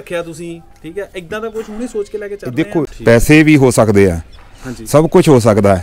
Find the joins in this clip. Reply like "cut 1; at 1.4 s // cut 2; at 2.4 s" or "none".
cut 1; at 2.9 s